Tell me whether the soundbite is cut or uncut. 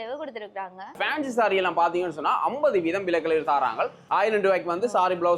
cut